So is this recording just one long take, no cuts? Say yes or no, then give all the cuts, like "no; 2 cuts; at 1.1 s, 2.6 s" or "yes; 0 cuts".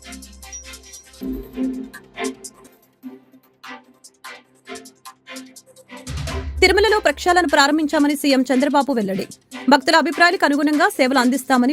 no; 1 cut; at 0.9 s